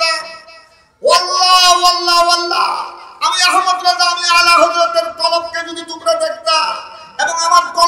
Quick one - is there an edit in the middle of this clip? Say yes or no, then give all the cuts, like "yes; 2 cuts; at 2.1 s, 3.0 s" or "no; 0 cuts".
no; 0 cuts